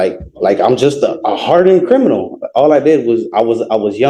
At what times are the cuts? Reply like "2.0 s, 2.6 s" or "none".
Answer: none